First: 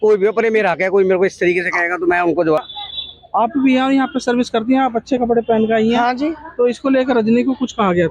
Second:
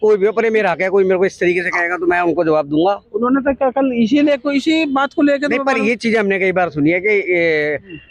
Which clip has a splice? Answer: first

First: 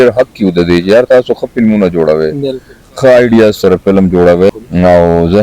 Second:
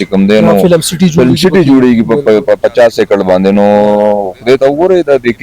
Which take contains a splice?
first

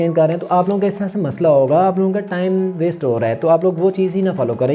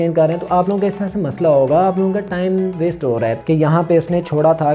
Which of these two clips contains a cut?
second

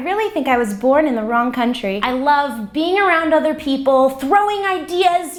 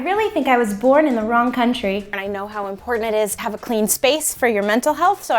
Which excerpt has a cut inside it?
second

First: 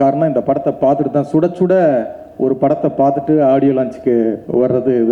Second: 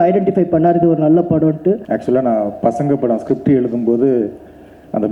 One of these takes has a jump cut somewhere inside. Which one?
second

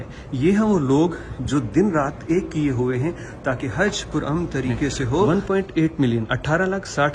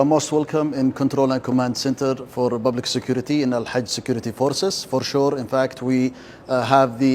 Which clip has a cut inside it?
first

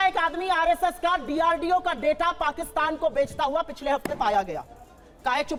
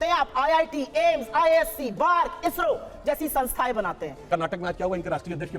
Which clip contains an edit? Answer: second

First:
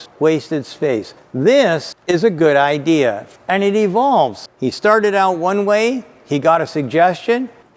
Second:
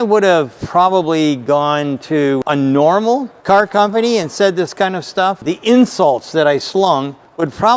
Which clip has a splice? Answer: second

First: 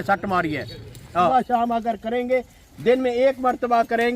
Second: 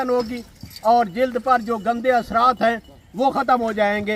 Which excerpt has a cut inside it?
first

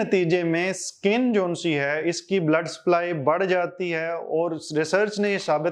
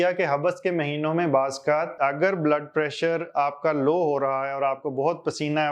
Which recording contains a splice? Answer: second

